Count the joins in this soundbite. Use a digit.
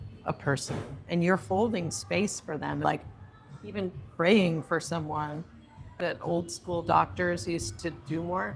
2